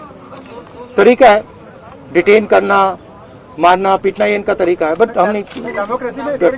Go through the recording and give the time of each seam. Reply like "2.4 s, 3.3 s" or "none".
none